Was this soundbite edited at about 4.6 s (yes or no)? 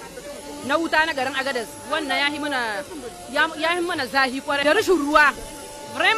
yes